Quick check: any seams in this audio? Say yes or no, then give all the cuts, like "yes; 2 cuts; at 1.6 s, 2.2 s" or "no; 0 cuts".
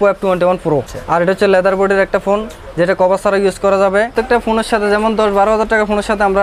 yes; 2 cuts; at 1.0 s, 4.1 s